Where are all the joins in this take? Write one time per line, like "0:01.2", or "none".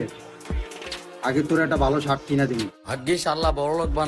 0:02.7